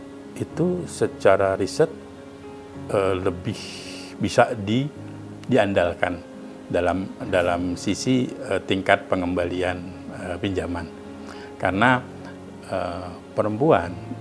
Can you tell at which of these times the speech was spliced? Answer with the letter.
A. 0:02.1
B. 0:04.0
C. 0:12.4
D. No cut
D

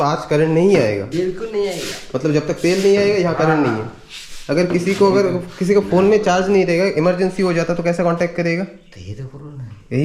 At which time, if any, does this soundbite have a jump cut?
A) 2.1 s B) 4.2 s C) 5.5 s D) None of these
D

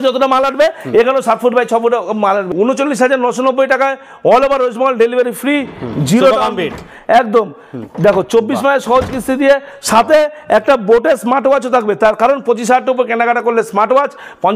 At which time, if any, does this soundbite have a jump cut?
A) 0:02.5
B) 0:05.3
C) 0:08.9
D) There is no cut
A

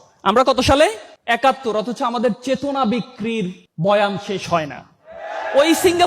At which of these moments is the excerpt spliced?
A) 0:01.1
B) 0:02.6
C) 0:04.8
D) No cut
A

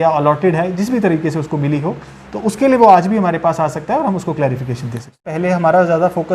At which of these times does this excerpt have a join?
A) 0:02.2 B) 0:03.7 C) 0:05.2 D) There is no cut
C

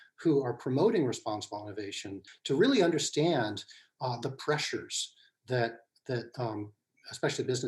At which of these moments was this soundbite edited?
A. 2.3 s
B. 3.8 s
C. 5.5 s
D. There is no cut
A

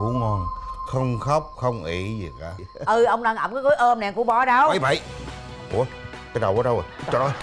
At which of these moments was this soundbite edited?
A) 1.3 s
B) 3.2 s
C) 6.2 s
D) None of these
D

